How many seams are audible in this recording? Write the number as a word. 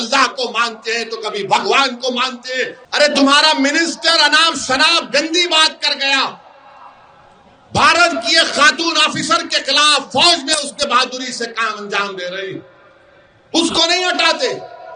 one